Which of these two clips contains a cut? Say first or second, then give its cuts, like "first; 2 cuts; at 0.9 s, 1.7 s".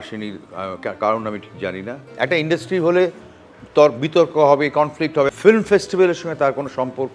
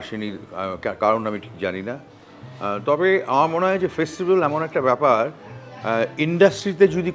first; 2 cuts; at 2.0 s, 5.3 s